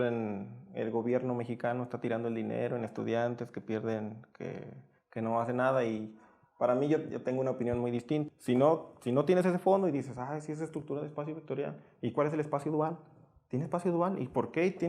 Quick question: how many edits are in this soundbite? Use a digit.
1